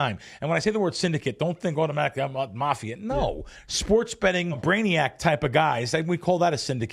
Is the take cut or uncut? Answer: cut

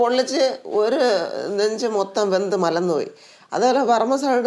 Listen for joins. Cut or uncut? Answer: uncut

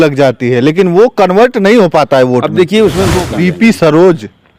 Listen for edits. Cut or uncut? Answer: cut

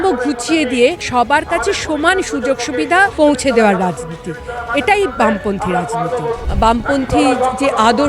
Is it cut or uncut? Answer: cut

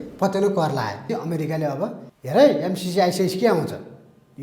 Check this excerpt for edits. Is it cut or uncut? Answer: cut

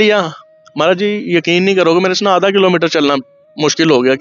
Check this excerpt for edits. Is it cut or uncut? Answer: uncut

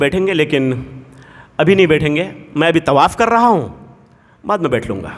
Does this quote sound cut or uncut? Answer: uncut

